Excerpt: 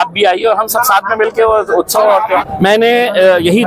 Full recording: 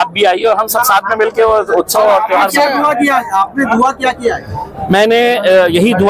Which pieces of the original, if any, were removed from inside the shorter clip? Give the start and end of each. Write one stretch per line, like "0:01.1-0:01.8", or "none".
0:02.5-0:04.7